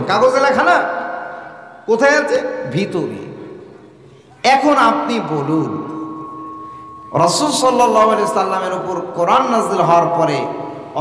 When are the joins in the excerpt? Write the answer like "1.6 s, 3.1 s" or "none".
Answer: none